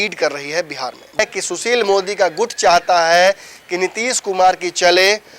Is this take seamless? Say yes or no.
no